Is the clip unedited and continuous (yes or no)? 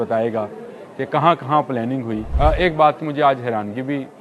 no